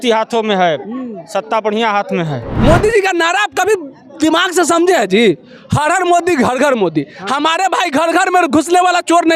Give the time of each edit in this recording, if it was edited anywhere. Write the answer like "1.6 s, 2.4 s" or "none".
2.5 s